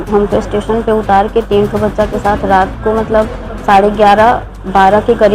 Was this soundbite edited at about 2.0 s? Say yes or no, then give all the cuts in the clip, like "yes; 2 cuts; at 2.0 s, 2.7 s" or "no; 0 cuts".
no; 0 cuts